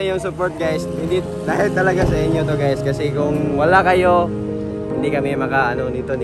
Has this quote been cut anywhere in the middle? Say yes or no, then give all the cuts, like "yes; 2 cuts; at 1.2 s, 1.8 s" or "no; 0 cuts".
no; 0 cuts